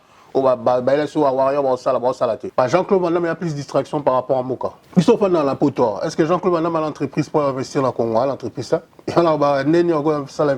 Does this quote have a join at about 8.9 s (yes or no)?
no